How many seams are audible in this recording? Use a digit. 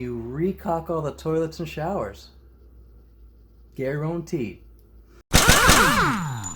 1